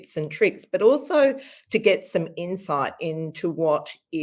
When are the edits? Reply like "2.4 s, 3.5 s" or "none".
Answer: none